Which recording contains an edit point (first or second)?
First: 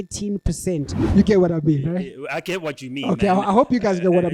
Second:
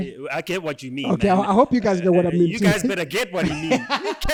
first